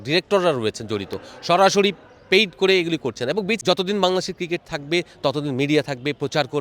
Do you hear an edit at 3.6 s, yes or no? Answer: yes